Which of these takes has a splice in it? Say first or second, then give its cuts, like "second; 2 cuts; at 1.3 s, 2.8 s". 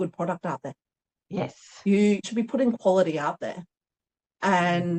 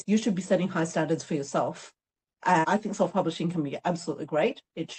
second; 1 cut; at 2.7 s